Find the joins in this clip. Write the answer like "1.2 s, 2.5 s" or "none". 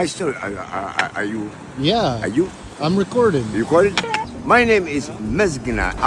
4.1 s